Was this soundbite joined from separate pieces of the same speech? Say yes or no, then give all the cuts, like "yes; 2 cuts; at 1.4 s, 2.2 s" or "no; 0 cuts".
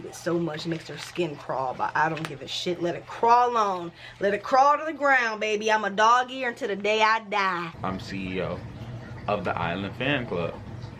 yes; 1 cut; at 7.7 s